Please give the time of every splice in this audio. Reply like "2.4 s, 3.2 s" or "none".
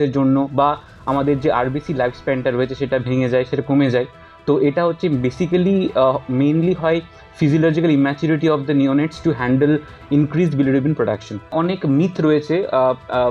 11.5 s